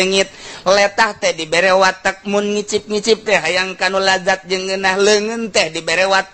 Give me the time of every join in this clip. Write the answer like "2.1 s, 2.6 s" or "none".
none